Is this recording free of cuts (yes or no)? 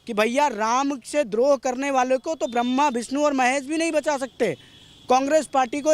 yes